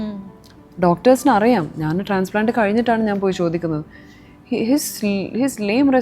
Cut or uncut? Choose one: uncut